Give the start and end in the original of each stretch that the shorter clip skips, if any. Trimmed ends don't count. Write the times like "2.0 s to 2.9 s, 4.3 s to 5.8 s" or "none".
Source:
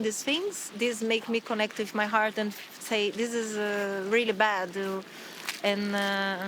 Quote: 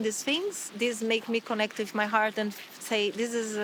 none